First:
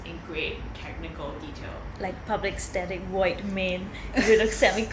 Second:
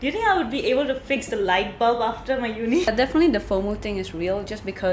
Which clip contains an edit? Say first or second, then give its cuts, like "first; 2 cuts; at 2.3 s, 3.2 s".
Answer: second; 1 cut; at 2.9 s